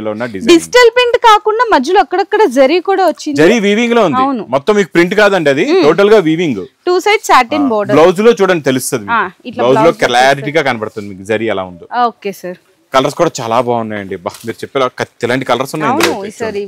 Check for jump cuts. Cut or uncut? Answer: uncut